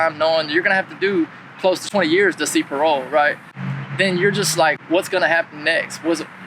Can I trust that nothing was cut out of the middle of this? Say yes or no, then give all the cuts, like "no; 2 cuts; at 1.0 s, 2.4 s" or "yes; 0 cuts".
no; 3 cuts; at 1.8 s, 3.5 s, 4.8 s